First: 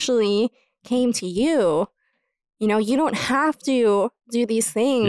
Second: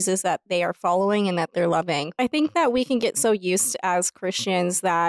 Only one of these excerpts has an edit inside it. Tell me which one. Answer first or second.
second